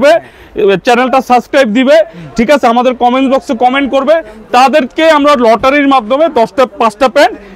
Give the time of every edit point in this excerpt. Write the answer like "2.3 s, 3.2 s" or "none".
none